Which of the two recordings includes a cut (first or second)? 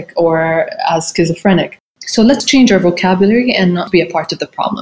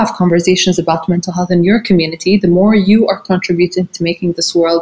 first